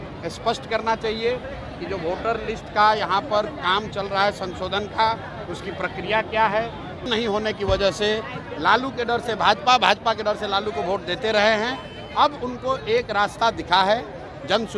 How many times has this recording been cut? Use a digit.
1